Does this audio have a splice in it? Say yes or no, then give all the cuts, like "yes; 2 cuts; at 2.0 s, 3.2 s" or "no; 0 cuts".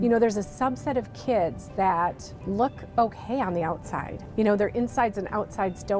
yes; 2 cuts; at 2.3 s, 4.2 s